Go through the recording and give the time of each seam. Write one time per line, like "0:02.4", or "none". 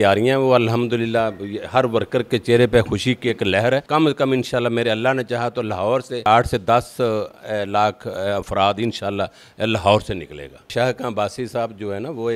0:03.8
0:06.3
0:10.7